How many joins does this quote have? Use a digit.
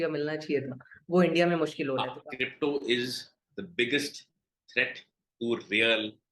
1